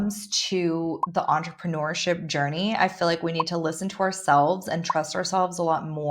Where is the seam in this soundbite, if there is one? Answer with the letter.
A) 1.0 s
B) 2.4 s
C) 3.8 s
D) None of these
A